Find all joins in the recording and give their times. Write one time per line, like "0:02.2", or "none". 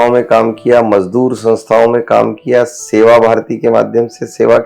none

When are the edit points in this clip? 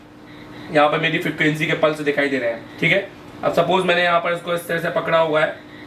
none

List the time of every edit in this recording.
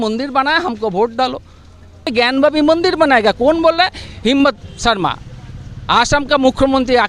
0:02.1

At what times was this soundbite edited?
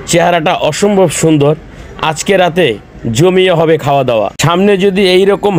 0:04.3

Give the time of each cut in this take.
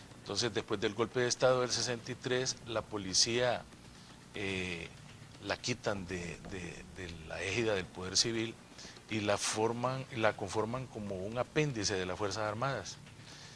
0:11.8

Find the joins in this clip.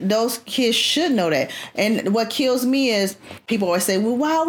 0:03.4

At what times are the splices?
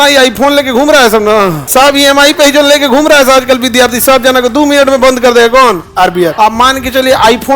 0:01.6
0:06.3

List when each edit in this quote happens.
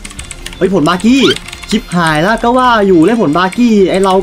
none

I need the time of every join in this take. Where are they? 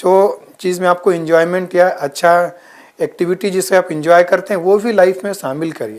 none

